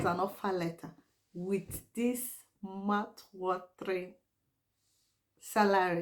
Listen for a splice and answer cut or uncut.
uncut